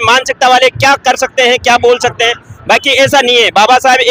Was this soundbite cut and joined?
no; 0 cuts

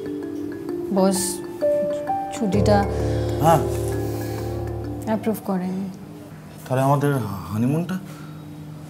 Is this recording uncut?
no; 1 cut; at 6.6 s

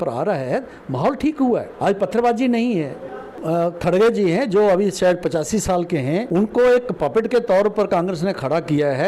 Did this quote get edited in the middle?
yes; 3 cuts; at 1.7 s, 3.3 s, 6.3 s

